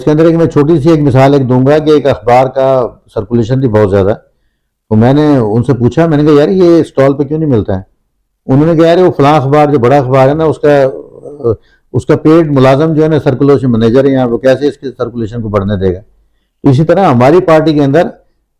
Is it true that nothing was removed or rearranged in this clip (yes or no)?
yes